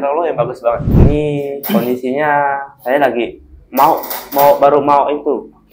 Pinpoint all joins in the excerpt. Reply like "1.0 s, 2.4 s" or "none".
0.9 s